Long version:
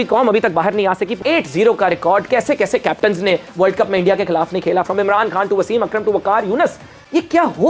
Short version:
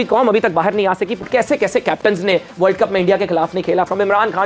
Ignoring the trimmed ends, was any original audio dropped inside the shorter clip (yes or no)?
yes